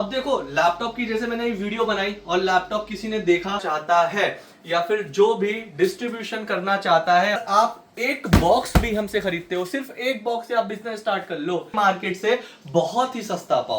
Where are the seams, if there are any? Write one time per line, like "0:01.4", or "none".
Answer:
0:03.7
0:07.4
0:11.7